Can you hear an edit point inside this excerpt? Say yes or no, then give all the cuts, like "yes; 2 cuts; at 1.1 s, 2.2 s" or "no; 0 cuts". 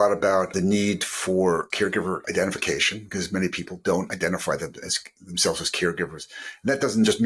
yes; 1 cut; at 1.8 s